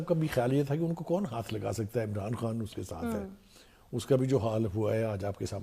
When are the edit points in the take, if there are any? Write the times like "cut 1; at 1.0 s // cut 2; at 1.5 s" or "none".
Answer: none

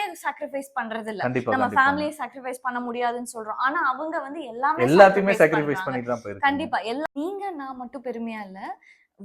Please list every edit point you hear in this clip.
cut 1; at 7.0 s

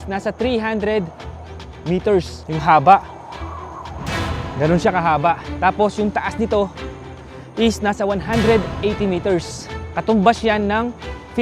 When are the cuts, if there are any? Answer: none

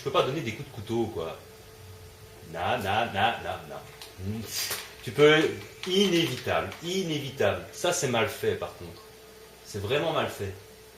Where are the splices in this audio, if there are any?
cut 1; at 9.6 s

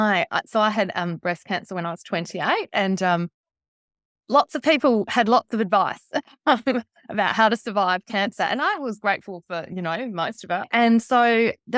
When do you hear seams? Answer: cut 1; at 10.6 s

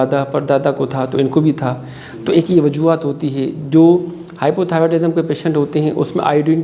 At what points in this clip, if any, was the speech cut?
none

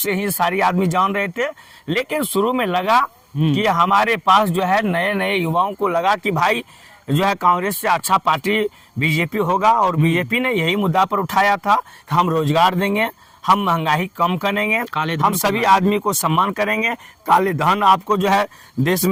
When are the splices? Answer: none

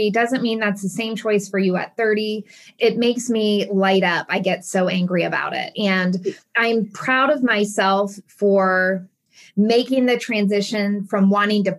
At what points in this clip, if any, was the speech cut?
none

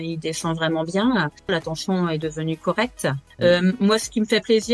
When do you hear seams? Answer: cut 1; at 1.5 s // cut 2; at 3.2 s

